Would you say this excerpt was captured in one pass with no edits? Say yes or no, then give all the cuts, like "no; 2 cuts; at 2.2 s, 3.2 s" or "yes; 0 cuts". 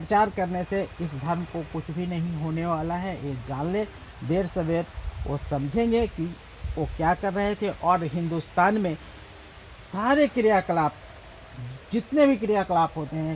yes; 0 cuts